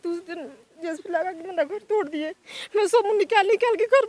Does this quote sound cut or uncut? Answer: uncut